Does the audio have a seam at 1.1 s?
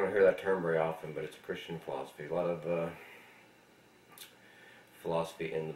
yes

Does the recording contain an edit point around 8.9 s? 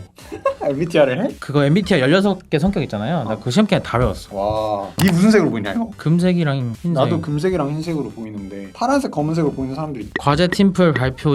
no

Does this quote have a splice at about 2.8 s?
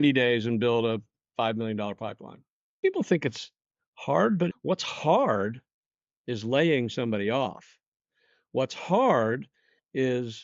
yes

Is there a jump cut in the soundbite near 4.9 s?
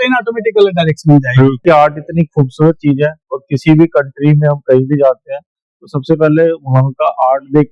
no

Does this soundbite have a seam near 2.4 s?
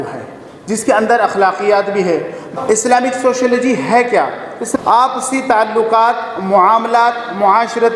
yes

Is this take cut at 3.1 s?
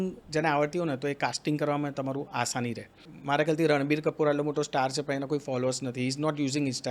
yes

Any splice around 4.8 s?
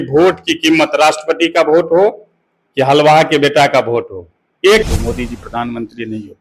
yes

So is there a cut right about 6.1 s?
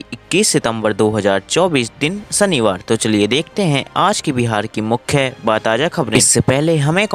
yes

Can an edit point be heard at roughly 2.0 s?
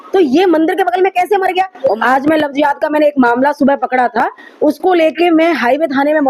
yes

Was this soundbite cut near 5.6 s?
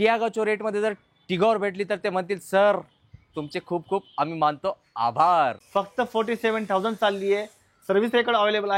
yes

